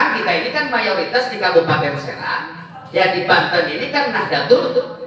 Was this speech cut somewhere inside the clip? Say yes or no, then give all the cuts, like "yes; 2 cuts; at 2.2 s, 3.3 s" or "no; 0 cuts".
no; 0 cuts